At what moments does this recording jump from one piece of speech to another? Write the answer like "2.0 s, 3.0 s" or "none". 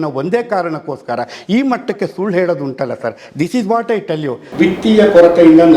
4.4 s